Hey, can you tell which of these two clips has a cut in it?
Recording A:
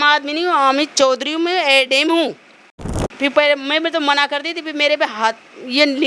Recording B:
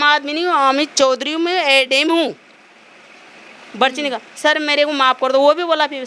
A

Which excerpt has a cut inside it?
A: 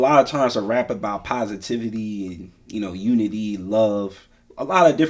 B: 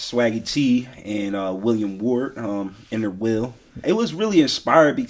B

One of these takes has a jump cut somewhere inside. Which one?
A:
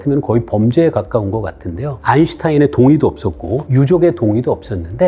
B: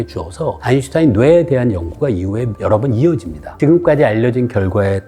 B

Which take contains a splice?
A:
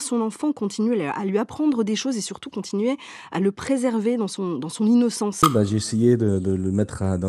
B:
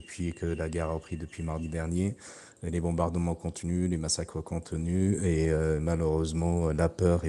A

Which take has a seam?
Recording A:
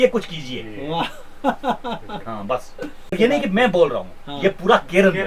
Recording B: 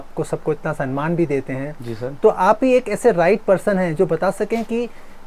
A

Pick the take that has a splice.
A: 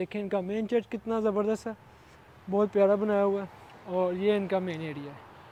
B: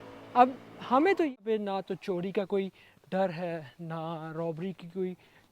B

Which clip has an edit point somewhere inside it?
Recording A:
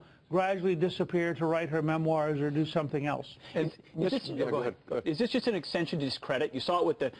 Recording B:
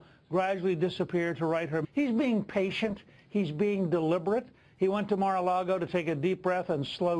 A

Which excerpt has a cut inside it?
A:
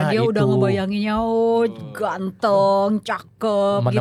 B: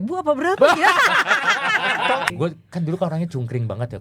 B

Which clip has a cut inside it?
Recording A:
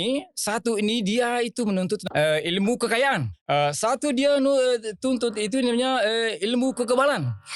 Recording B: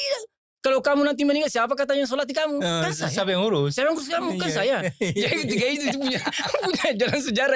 A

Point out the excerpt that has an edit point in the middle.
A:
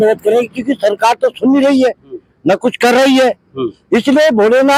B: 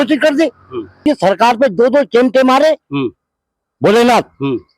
B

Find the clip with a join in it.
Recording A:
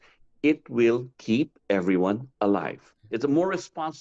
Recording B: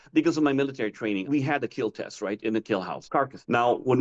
B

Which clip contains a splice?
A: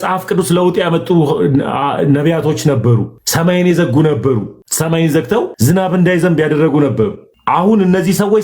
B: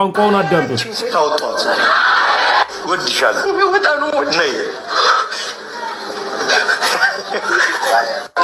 A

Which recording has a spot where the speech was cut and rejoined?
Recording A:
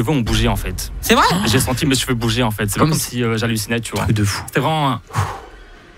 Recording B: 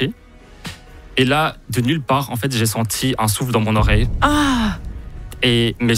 A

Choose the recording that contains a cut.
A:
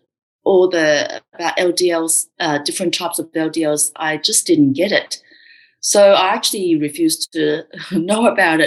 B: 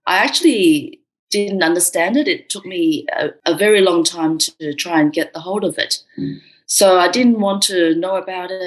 B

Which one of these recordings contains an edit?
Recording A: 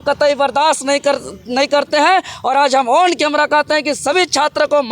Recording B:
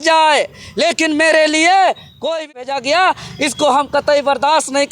B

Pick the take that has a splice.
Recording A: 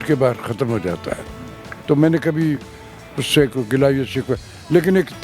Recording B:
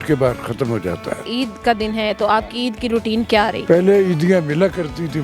B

